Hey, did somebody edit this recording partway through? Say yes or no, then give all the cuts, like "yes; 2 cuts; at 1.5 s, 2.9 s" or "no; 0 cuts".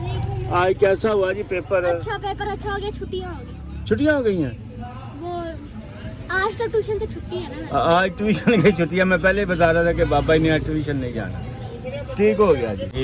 no; 0 cuts